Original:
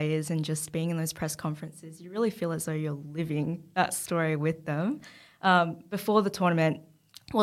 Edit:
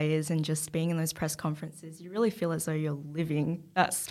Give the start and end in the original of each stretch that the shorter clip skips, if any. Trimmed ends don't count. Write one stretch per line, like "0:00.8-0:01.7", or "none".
none